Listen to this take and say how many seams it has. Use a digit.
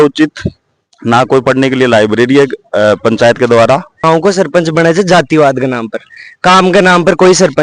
1